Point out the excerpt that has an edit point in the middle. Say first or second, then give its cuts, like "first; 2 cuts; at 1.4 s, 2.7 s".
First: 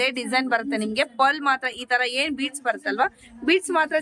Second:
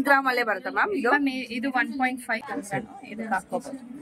second; 1 cut; at 2.4 s